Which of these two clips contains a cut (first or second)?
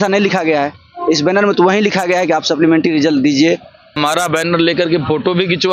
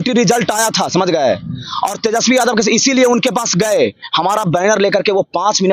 first